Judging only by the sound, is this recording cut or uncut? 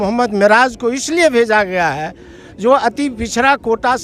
uncut